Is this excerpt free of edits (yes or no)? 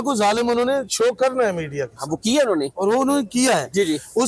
yes